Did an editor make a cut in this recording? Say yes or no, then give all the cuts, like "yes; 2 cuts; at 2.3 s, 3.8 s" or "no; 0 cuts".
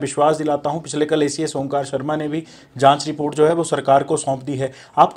no; 0 cuts